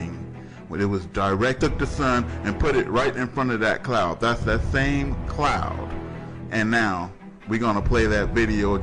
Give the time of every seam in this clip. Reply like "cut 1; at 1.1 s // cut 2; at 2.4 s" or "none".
none